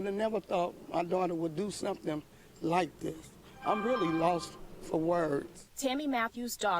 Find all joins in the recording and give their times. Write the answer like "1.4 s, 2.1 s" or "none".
3.3 s